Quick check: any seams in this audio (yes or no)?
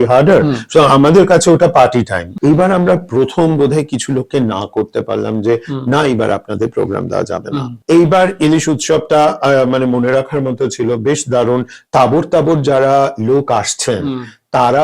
yes